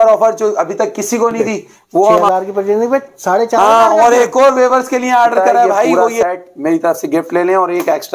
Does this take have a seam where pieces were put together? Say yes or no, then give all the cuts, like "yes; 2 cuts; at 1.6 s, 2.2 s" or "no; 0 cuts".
yes; 2 cuts; at 2.3 s, 5.9 s